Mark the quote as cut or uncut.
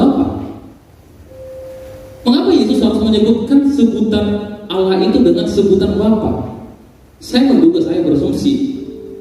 cut